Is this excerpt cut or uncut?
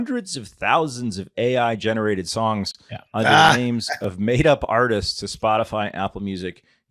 uncut